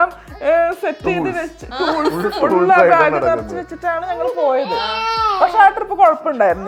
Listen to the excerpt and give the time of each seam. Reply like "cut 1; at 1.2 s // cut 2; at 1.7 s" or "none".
none